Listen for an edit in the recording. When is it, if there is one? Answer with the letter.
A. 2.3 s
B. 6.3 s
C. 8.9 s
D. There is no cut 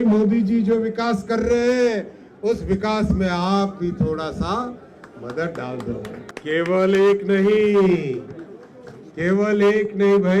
B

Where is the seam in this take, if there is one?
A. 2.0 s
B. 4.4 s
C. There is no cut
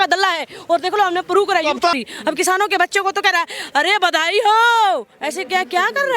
A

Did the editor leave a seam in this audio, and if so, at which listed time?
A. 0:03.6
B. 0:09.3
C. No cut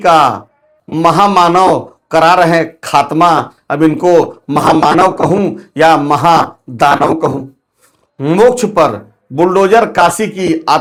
C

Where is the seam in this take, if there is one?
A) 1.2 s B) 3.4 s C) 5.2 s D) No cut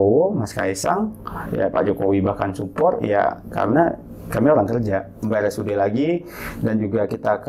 C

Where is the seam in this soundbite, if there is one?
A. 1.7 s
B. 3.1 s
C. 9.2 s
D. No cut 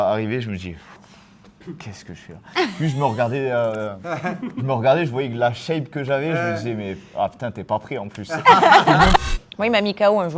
C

